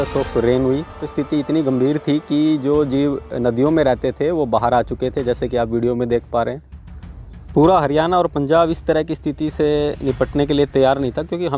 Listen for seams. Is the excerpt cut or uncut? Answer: cut